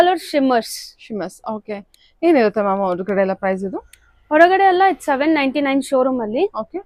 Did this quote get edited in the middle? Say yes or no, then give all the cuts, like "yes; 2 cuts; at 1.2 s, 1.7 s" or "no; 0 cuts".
no; 0 cuts